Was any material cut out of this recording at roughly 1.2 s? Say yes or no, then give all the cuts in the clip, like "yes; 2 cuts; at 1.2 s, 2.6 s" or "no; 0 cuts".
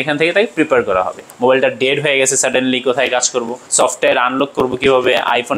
yes; 2 cuts; at 1.2 s, 3.6 s